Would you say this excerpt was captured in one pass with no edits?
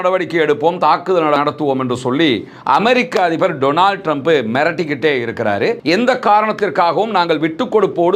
no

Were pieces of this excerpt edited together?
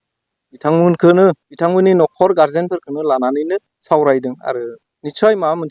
no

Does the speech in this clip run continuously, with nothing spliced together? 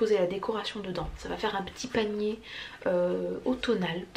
yes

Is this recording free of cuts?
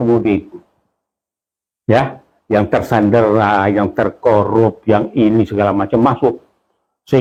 yes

